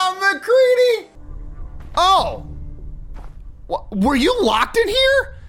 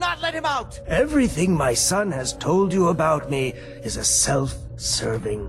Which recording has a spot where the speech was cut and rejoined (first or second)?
first